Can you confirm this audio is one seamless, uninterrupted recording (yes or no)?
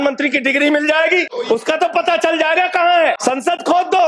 no